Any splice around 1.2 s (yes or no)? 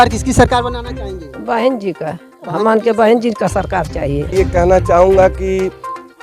no